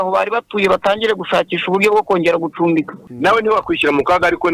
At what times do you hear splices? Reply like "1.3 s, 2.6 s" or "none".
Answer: 3.0 s